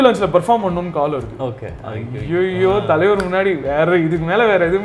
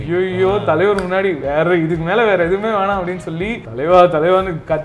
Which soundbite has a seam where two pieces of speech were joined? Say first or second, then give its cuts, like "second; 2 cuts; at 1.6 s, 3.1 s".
second; 1 cut; at 3.6 s